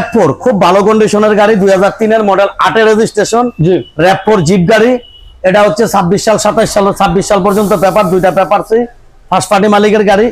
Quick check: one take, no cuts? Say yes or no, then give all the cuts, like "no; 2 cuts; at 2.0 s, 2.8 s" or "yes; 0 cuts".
yes; 0 cuts